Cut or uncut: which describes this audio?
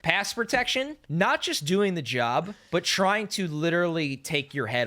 cut